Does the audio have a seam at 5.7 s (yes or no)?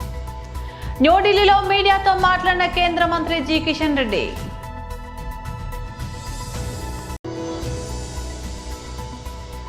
no